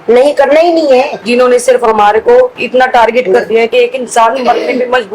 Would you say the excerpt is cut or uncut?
cut